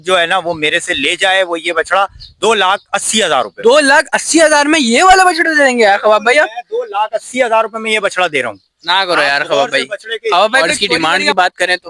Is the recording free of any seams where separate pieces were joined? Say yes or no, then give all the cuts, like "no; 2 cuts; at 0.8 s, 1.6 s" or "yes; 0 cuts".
no; 1 cut; at 10.7 s